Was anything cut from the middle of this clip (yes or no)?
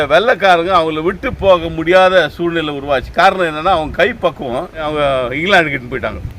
yes